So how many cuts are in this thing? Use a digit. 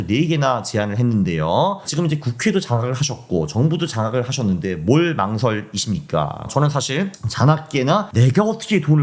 2